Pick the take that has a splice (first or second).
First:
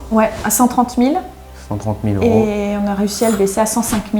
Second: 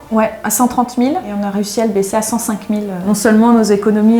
second